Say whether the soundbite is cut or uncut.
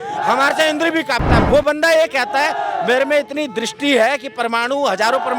cut